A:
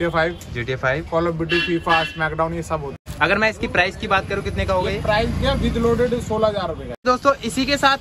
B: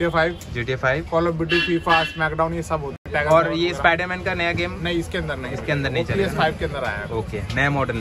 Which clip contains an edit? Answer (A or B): A